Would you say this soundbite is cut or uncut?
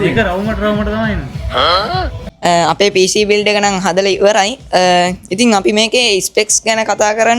cut